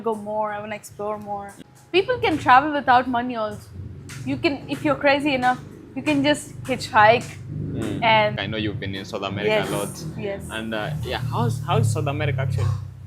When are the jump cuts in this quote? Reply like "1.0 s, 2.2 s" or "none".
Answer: 1.5 s, 8.4 s